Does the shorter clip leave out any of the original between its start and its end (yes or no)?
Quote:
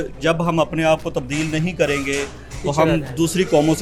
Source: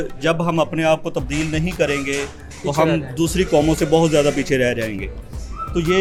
no